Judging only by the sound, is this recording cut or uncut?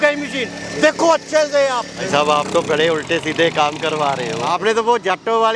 cut